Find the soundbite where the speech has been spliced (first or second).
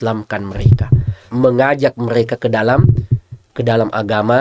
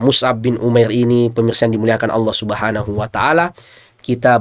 first